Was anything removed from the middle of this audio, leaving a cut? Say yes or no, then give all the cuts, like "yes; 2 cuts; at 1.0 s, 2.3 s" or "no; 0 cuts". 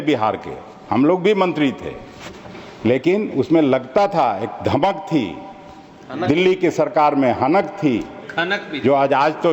no; 0 cuts